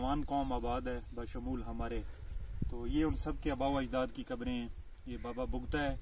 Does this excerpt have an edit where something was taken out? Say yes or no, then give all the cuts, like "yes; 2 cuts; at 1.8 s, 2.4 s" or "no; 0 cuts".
no; 0 cuts